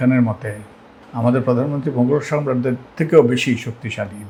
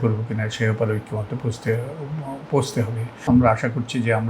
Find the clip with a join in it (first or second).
second